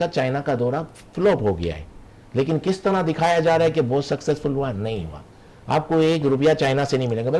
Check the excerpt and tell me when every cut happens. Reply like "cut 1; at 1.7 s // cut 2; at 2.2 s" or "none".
none

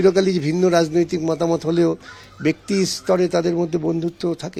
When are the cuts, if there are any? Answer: none

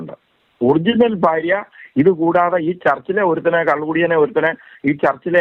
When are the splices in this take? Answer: none

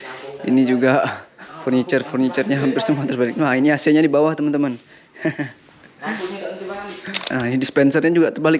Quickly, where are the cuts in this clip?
cut 1; at 7.2 s

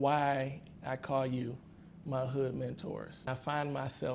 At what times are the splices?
cut 1; at 3.3 s

